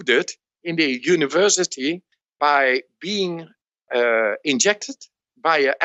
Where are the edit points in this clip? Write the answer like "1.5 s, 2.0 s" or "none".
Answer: none